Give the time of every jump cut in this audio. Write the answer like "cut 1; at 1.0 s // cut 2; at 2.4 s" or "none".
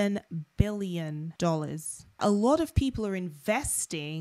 cut 1; at 1.3 s // cut 2; at 2.2 s

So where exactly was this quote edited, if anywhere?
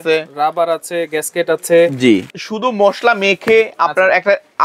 cut 1; at 2.3 s

